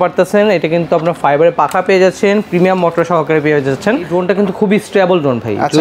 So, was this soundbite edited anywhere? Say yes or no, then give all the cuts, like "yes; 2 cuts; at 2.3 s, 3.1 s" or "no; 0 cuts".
yes; 1 cut; at 4.1 s